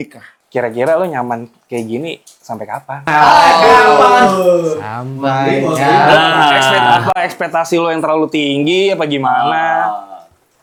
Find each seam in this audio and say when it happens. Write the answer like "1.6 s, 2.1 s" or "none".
none

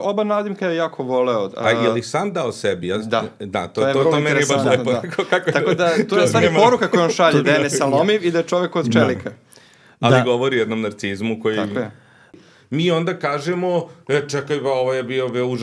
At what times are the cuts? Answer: 12.3 s

